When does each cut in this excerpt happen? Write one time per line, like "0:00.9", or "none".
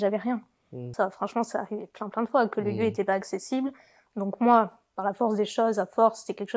0:00.9